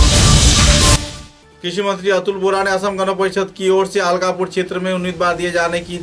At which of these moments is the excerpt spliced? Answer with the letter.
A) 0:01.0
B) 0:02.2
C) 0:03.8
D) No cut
A